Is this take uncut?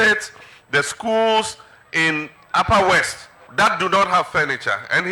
yes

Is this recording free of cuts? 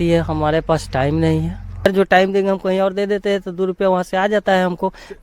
no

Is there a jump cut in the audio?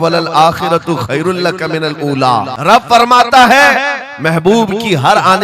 yes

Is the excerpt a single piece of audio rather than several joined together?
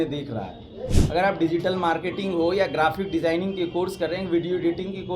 no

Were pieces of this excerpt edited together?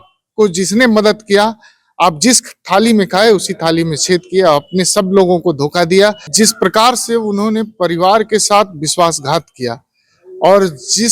yes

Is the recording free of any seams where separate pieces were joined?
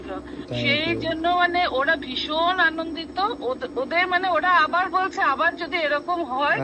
yes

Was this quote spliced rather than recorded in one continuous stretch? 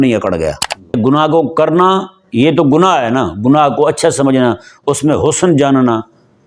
yes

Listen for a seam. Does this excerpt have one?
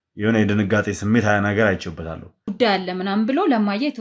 yes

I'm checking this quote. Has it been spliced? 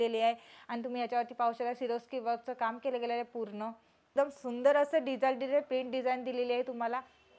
yes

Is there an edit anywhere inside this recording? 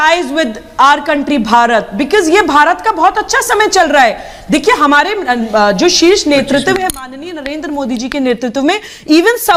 no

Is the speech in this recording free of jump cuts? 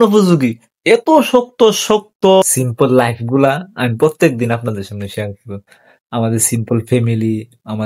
no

